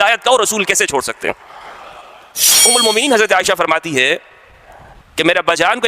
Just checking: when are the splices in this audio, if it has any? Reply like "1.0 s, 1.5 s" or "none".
2.5 s